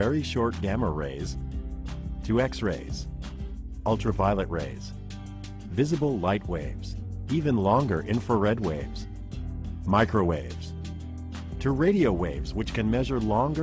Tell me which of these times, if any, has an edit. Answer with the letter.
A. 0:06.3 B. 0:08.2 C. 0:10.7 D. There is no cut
B